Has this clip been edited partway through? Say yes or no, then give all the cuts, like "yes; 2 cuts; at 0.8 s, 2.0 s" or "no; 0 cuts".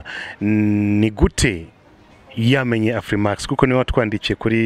no; 0 cuts